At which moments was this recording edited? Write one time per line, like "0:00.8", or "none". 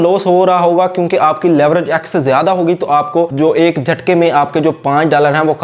0:03.3